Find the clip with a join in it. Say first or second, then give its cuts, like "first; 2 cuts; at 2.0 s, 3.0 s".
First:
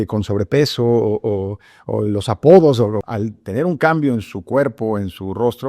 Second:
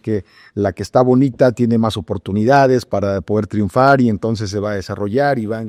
first; 1 cut; at 3.0 s